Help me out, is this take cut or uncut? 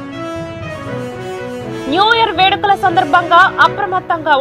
uncut